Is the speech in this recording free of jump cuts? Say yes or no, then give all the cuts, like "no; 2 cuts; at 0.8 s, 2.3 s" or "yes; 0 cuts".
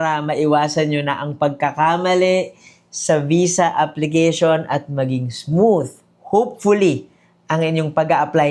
yes; 0 cuts